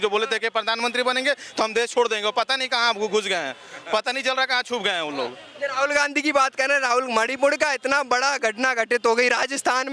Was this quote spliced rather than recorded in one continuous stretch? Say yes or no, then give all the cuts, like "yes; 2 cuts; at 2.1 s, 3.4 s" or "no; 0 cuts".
no; 0 cuts